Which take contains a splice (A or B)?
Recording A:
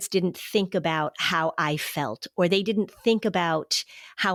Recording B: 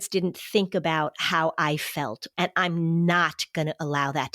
B